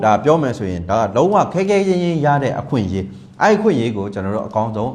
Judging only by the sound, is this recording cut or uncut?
uncut